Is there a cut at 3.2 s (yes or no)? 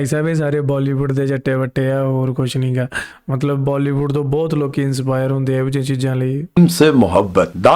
no